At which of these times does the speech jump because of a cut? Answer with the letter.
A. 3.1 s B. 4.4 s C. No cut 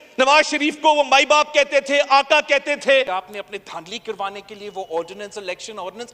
A